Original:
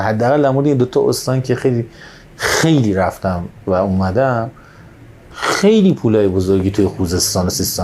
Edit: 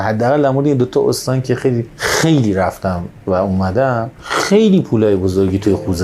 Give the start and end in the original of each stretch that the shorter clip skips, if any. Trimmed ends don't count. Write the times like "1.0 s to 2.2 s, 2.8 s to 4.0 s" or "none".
1.9 s to 2.3 s, 4.6 s to 5.3 s